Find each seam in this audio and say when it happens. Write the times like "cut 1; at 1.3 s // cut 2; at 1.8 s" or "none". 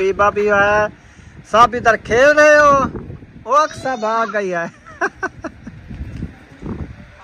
none